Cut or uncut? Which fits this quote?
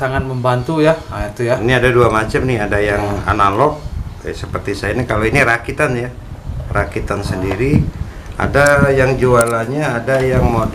uncut